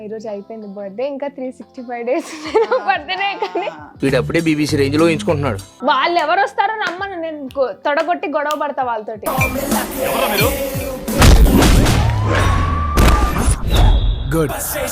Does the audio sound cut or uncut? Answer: cut